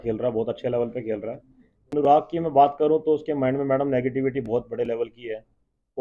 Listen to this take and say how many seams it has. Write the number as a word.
one